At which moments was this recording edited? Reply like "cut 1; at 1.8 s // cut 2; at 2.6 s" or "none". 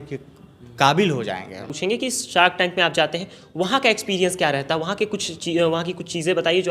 cut 1; at 1.7 s